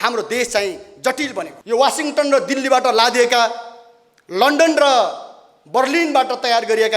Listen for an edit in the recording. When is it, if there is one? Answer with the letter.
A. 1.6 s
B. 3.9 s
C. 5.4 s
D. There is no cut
A